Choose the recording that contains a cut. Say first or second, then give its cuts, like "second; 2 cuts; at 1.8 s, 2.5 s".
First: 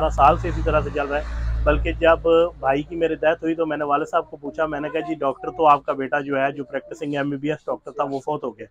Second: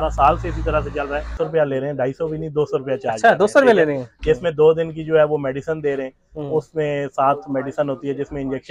second; 1 cut; at 1.3 s